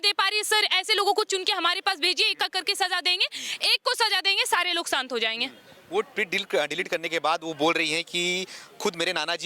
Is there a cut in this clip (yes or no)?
no